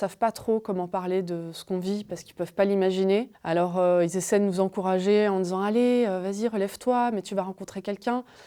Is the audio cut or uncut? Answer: uncut